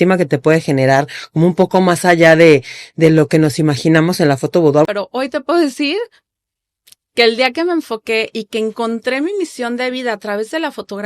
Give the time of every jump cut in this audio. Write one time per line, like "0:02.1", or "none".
0:04.9